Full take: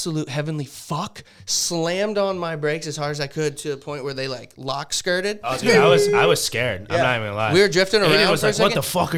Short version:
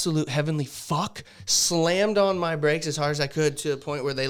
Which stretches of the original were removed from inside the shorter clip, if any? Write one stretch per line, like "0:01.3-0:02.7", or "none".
none